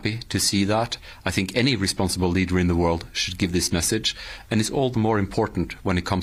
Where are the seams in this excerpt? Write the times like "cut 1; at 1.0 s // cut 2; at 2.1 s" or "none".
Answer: none

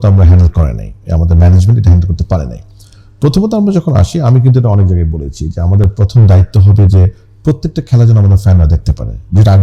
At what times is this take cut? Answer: none

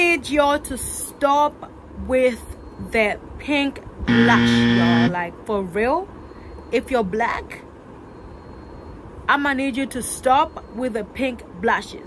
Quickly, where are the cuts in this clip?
none

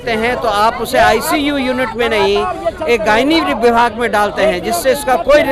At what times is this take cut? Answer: none

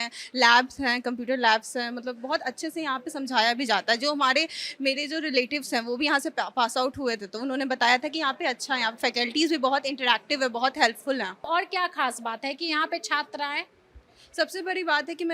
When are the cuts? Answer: none

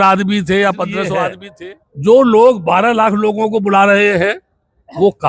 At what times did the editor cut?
cut 1; at 1.4 s

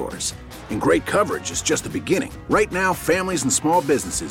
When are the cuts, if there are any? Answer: none

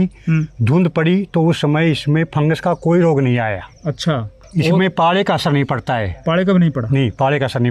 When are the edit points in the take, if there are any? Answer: none

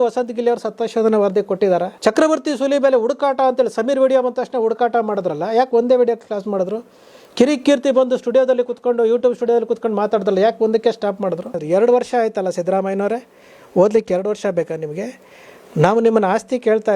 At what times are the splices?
cut 1; at 1.9 s // cut 2; at 11.5 s

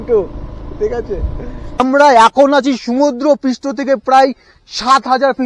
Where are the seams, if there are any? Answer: cut 1; at 1.8 s

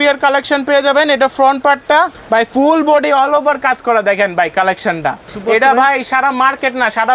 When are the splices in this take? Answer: cut 1; at 2.2 s // cut 2; at 5.3 s

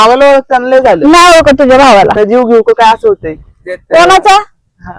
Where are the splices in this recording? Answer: cut 1; at 2.1 s

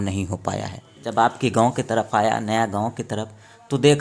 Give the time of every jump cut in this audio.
cut 1; at 1.0 s

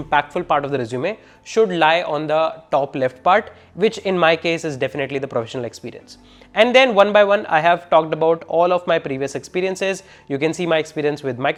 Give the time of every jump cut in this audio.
none

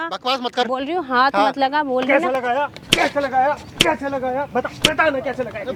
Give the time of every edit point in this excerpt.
none

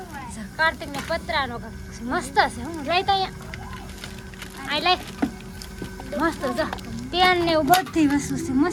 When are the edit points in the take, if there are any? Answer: none

